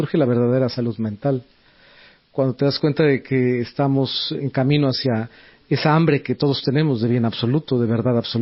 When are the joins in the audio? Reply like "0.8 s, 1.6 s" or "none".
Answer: 4.4 s